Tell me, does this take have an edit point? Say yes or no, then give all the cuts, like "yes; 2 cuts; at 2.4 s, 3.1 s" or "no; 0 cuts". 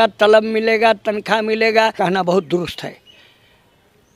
yes; 1 cut; at 1.9 s